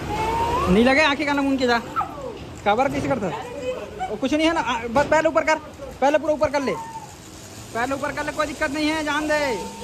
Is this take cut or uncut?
uncut